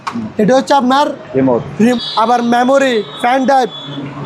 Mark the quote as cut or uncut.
cut